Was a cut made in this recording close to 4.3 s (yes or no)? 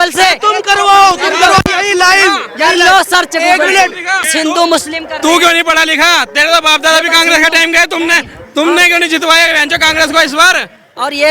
yes